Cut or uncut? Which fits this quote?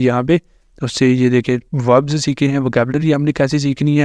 cut